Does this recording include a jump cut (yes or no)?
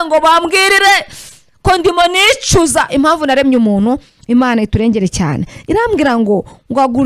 no